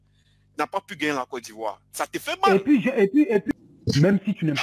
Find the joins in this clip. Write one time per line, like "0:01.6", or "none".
0:03.5